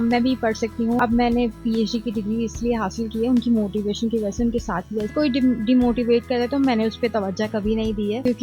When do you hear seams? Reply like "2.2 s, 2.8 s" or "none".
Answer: 1.0 s, 5.1 s

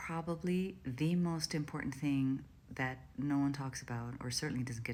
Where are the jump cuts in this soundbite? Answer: none

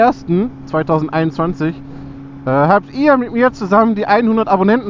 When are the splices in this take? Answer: none

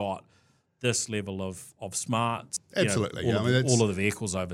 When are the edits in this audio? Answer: 2.6 s

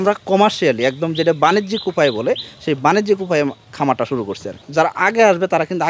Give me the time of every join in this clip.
4.6 s

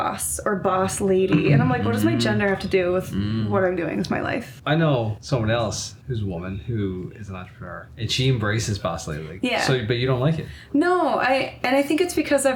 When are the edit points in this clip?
4.5 s, 5.2 s, 5.9 s, 7.8 s, 9.2 s

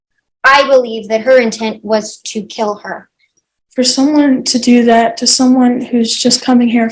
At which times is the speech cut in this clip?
3.4 s

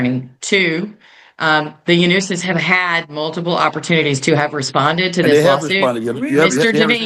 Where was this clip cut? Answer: none

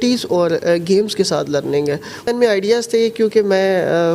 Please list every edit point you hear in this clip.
2.3 s

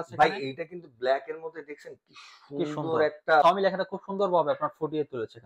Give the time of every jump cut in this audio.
3.4 s

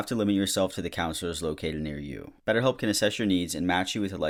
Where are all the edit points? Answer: none

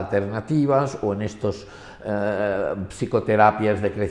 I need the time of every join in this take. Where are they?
none

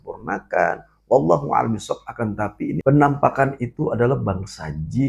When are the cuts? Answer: 2.8 s

